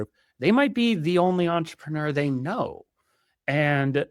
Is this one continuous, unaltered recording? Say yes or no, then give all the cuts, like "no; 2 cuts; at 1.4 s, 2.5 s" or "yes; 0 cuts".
yes; 0 cuts